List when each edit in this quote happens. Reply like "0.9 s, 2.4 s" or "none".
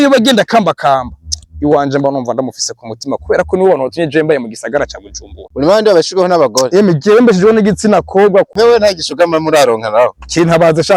5.4 s, 8.5 s